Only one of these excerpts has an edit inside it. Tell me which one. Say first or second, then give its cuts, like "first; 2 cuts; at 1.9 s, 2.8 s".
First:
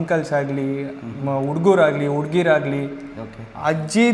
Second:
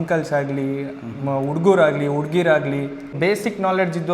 second; 1 cut; at 3.1 s